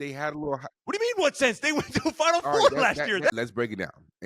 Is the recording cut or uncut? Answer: cut